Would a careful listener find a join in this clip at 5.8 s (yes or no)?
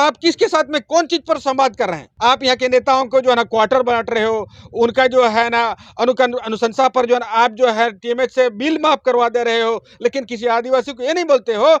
no